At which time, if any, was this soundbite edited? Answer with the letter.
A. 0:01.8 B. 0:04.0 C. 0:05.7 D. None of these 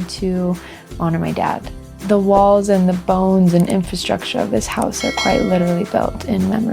A